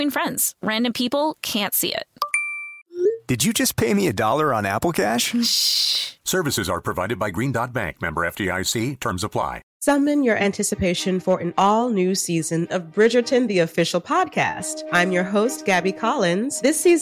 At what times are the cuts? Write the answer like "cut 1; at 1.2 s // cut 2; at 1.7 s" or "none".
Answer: cut 1; at 9.7 s